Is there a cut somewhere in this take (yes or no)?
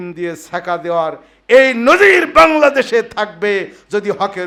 no